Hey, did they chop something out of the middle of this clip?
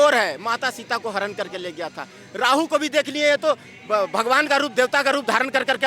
no; 0 cuts

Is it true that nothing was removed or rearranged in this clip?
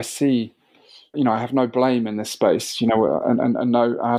yes; 0 cuts

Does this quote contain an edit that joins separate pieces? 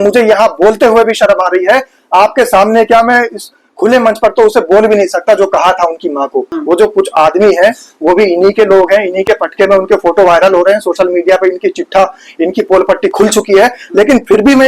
yes; 1 cut; at 6.5 s

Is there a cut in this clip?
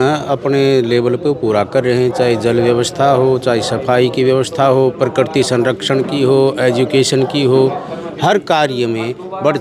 no; 0 cuts

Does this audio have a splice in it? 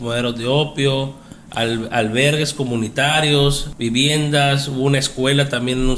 yes; 1 cut; at 3.7 s

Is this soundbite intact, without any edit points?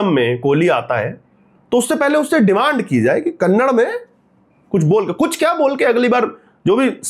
yes; 0 cuts

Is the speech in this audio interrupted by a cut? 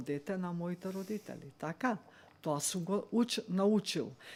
no; 0 cuts

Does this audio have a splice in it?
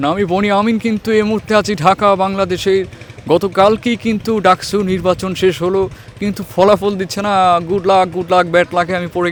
no; 0 cuts

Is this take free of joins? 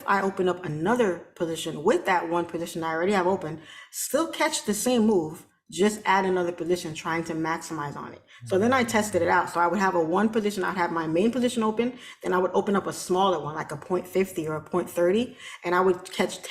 yes; 0 cuts

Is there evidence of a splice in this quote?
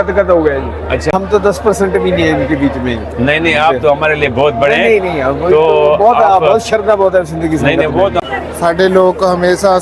yes; 2 cuts; at 1.1 s, 8.2 s

